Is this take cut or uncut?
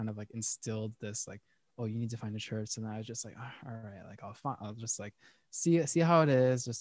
uncut